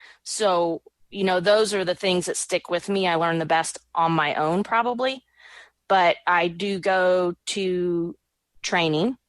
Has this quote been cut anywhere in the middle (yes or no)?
no